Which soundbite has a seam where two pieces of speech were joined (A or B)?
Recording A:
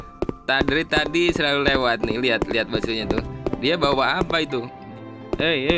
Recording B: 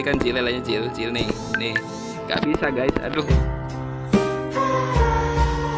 A